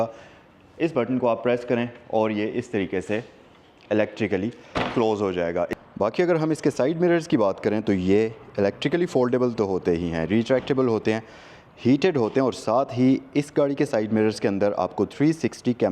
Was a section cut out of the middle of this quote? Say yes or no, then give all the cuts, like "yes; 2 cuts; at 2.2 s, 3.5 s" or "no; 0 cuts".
yes; 1 cut; at 5.8 s